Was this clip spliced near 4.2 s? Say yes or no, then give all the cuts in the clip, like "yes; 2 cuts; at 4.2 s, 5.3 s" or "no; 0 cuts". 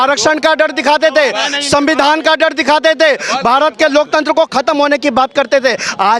no; 0 cuts